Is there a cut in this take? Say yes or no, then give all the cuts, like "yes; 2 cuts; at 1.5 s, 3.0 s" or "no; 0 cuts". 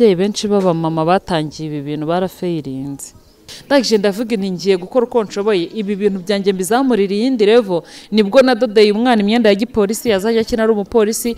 yes; 1 cut; at 3.5 s